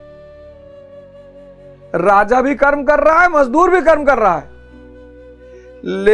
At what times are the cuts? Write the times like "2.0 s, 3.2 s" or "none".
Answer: none